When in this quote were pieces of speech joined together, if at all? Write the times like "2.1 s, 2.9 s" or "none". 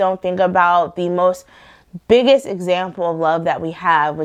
none